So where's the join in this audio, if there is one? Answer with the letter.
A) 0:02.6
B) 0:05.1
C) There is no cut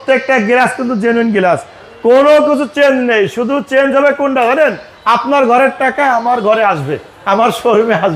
C